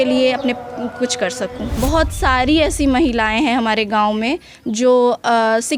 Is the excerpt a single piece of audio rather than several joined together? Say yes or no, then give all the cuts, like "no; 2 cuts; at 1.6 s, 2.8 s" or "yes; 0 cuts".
no; 1 cut; at 1.7 s